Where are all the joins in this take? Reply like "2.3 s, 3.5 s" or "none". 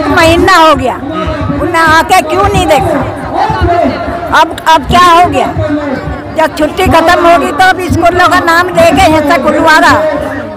none